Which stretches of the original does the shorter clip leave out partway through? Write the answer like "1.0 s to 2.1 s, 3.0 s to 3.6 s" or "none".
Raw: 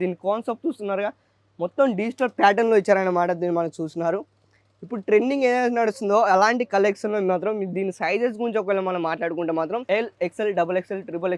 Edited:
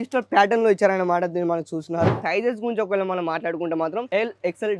4.3 s to 8.0 s